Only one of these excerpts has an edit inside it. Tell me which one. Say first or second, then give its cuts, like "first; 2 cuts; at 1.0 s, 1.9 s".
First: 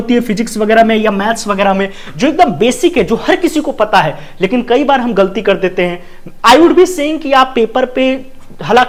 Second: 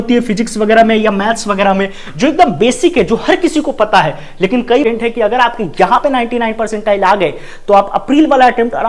second; 1 cut; at 4.8 s